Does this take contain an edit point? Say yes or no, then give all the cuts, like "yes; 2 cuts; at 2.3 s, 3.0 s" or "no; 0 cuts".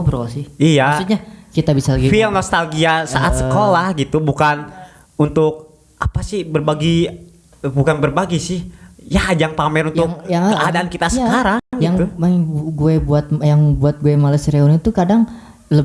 no; 0 cuts